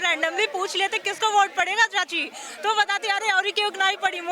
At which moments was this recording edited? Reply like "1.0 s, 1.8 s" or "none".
none